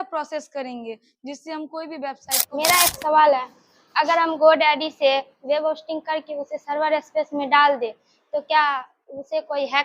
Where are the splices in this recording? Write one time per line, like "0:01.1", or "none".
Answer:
0:02.5